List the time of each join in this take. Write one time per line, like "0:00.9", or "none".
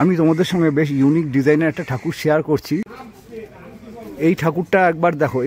0:02.9